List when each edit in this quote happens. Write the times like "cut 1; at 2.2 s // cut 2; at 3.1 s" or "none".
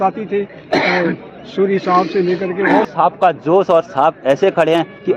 cut 1; at 2.8 s